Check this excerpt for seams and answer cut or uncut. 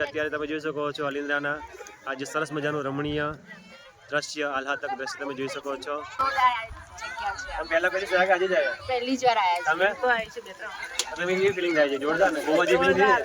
cut